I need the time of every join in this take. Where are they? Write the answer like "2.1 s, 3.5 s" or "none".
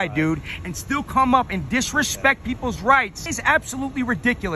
3.3 s